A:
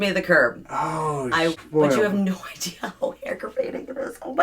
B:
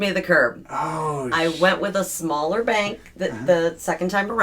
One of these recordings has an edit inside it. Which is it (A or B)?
A